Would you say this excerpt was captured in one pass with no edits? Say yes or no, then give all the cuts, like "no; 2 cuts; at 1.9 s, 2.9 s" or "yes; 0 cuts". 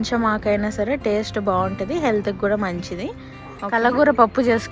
no; 1 cut; at 3.5 s